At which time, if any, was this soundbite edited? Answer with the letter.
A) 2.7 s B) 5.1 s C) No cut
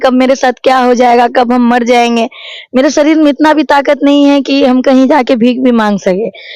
C